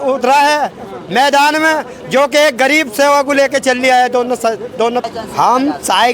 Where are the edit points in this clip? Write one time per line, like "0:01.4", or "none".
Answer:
0:05.0